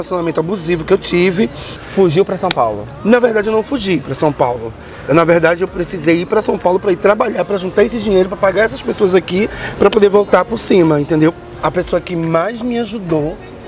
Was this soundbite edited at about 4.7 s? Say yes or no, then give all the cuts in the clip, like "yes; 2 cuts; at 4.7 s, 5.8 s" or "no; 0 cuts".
no; 2 cuts; at 1.8 s, 11.3 s